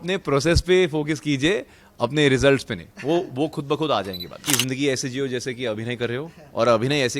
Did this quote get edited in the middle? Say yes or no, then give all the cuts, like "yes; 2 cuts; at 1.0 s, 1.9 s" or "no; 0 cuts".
yes; 1 cut; at 4.4 s